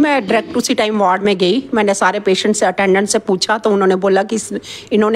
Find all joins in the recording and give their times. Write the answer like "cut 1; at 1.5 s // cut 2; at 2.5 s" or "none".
none